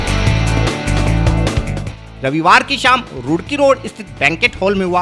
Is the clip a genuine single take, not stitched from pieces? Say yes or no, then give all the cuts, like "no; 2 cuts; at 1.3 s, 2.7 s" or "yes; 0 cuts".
no; 1 cut; at 1.8 s